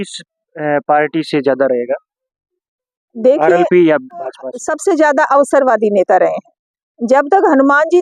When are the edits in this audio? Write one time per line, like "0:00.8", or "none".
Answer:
0:04.5

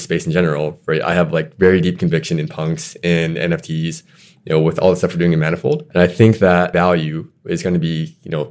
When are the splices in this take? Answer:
0:05.8
0:06.7

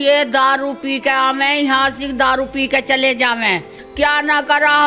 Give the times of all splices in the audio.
0:03.8

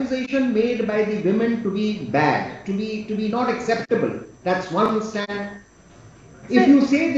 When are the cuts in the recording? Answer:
none

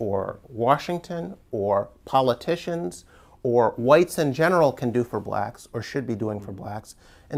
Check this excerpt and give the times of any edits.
none

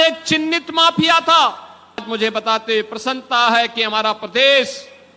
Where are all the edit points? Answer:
0:02.0

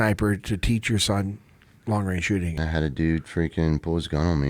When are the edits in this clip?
0:02.6

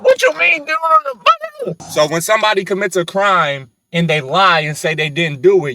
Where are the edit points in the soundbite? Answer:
0:01.8

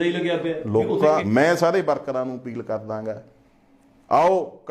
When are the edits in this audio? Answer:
0:01.2

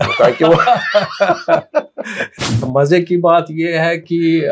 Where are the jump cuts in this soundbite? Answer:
0:02.6

